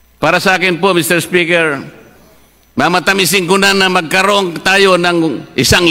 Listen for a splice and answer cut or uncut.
uncut